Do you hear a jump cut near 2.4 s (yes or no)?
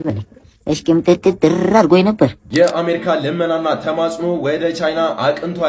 yes